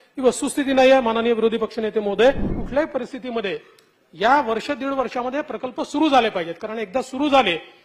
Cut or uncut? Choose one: cut